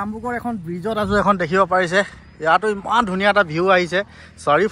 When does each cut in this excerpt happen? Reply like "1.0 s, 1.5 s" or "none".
none